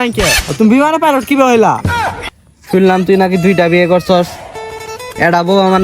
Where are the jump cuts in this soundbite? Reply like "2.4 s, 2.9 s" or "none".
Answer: 2.2 s